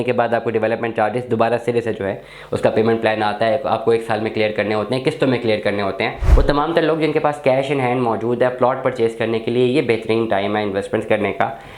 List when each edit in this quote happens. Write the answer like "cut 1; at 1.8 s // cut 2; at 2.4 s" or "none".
cut 1; at 6.2 s